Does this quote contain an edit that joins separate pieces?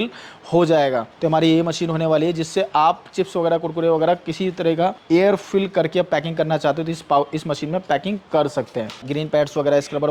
yes; 3 cuts; at 1.1 s, 5.3 s, 9.1 s

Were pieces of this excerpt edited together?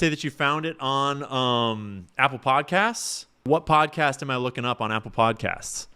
yes; 1 cut; at 3.4 s

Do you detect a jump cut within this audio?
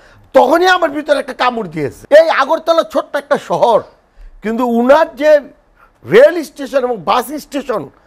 yes; 1 cut; at 2.0 s

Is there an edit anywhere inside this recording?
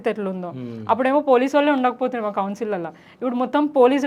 no; 0 cuts

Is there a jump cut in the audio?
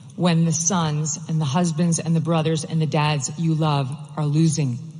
no; 0 cuts

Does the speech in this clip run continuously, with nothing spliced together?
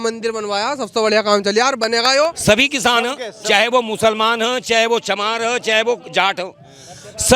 no; 1 cut; at 2.4 s

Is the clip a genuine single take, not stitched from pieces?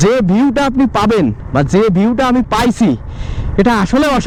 yes; 0 cuts

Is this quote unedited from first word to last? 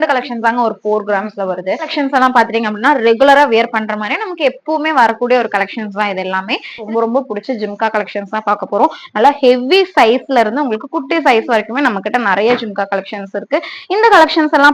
no; 2 cuts; at 1.9 s, 6.8 s

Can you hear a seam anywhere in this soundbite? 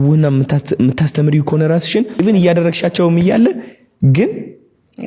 yes; 1 cut; at 2.1 s

